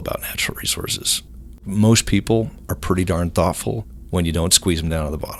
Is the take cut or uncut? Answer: uncut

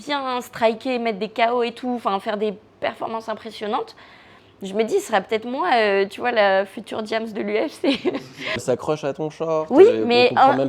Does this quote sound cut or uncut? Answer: cut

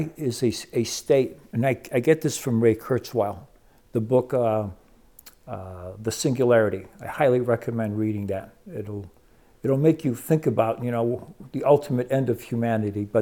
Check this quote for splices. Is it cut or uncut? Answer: uncut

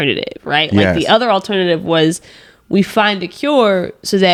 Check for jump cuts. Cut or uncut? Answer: uncut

